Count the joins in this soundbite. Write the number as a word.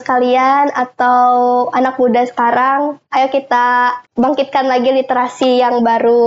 one